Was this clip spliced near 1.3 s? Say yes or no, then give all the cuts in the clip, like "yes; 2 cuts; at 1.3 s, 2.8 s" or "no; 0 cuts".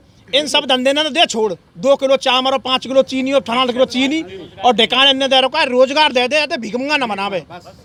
no; 0 cuts